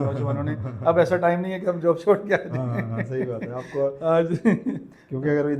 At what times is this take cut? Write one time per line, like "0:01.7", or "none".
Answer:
none